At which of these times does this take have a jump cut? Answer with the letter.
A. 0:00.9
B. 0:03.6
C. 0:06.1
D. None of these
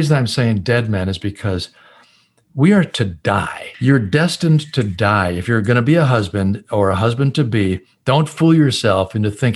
B